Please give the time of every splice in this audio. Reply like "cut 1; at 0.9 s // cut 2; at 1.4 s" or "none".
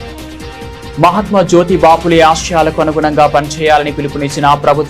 cut 1; at 1.0 s